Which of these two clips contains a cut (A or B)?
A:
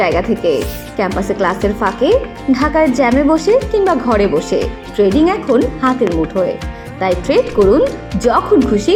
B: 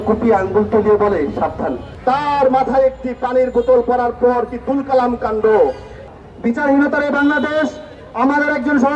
B